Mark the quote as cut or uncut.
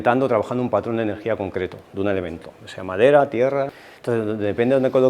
cut